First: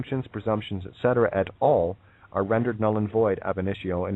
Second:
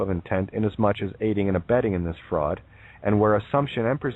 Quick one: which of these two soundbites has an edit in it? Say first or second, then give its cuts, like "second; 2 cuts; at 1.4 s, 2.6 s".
first; 1 cut; at 1.2 s